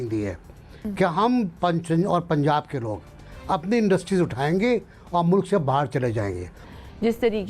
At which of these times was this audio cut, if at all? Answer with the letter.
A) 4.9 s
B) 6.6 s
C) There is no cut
B